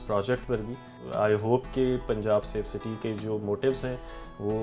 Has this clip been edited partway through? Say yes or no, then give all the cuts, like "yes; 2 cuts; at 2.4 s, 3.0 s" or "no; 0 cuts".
yes; 1 cut; at 1.0 s